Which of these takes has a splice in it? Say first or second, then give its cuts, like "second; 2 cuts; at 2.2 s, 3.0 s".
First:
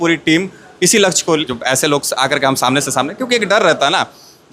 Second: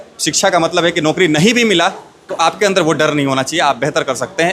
first; 1 cut; at 1.5 s